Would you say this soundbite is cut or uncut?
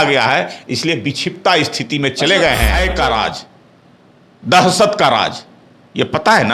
cut